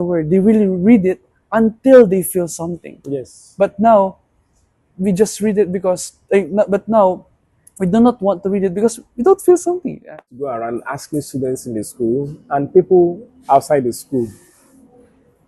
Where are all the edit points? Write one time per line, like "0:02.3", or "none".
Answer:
0:10.3